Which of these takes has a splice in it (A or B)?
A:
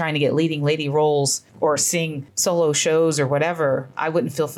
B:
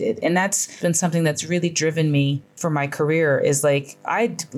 B